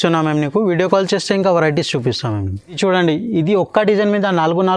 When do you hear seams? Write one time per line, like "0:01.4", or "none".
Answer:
none